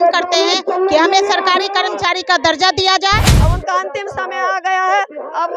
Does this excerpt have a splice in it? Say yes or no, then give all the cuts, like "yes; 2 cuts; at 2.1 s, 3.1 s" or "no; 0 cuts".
yes; 1 cut; at 3.3 s